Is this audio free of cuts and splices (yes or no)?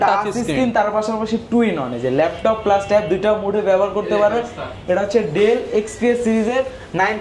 yes